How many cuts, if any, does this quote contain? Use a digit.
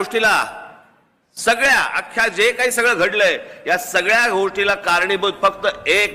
0